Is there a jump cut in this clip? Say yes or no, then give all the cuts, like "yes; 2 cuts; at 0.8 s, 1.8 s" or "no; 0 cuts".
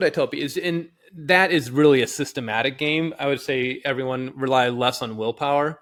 no; 0 cuts